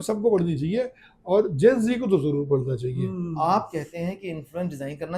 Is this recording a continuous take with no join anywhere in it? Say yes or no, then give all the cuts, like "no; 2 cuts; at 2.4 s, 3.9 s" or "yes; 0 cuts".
no; 1 cut; at 3.0 s